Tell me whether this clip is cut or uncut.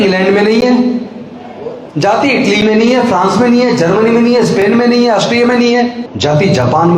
cut